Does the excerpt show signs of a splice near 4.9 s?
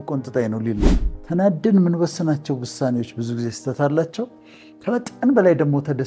no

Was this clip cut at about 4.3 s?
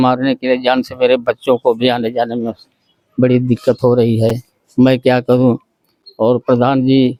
no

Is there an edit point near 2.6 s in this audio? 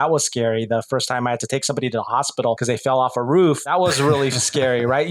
yes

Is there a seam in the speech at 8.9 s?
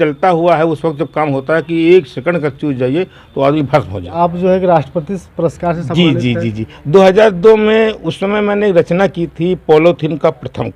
no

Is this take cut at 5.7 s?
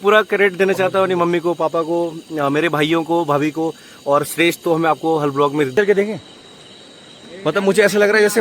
yes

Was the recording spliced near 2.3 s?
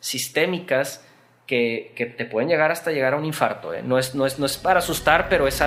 no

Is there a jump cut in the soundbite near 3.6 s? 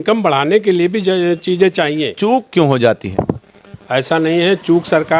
no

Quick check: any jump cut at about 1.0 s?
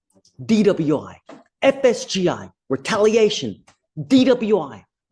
no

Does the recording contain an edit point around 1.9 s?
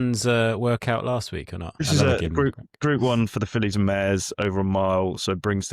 yes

